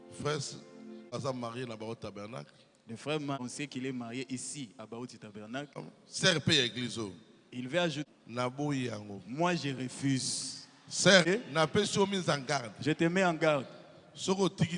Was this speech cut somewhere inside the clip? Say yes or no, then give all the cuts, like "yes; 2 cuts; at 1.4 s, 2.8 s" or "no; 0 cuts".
yes; 5 cuts; at 1.1 s, 3.4 s, 5.8 s, 8.0 s, 11.2 s